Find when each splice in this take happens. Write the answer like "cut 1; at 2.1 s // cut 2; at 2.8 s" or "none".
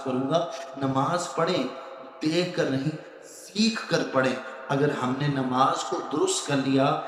none